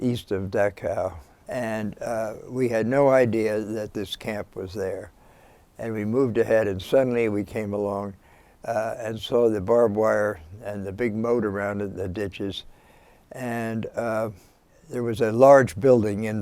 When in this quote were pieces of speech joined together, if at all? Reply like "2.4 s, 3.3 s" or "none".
none

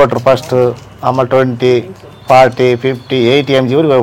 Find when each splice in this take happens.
none

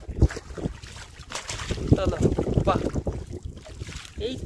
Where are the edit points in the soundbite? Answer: none

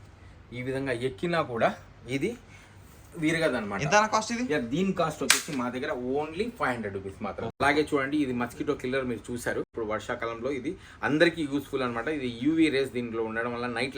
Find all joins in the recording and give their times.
7.5 s, 9.7 s

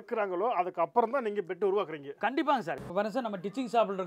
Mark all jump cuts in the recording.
2.8 s

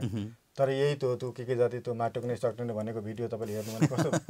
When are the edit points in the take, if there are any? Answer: none

